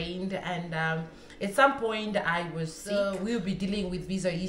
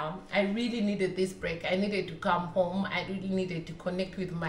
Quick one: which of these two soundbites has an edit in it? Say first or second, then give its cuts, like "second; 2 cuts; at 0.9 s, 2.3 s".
first; 1 cut; at 2.8 s